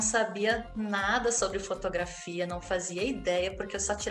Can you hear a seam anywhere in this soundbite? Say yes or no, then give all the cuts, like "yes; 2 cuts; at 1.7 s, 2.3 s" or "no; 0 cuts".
no; 0 cuts